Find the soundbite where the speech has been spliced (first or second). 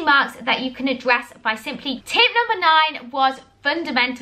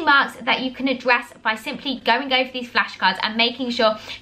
first